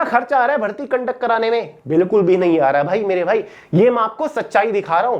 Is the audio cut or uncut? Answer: uncut